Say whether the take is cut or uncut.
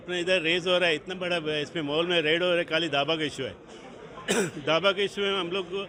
uncut